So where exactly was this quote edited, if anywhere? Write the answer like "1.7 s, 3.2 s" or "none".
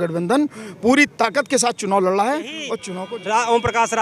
2.8 s